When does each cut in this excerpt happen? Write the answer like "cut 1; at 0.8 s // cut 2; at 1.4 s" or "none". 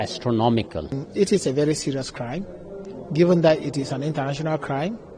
cut 1; at 1.0 s